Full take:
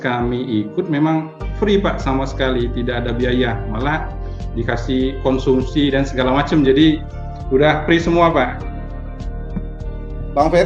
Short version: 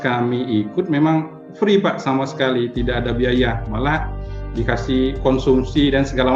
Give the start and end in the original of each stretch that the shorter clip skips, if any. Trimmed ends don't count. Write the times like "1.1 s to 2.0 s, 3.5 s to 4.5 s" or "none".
none